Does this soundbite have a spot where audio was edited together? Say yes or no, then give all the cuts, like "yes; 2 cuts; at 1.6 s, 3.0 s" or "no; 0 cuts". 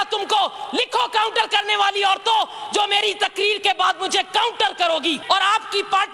yes; 1 cut; at 5.2 s